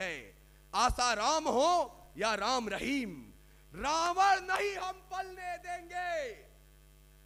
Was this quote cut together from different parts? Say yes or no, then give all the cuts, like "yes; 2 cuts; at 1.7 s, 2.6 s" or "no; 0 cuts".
no; 0 cuts